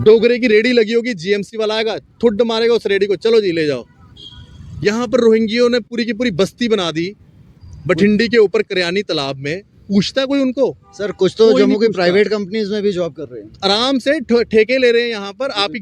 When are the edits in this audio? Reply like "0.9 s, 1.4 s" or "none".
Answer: none